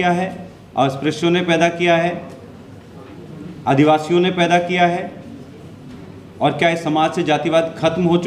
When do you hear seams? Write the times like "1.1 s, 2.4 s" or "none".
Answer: none